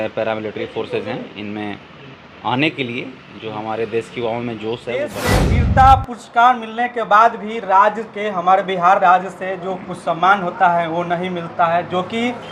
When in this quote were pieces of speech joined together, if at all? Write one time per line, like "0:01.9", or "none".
0:05.3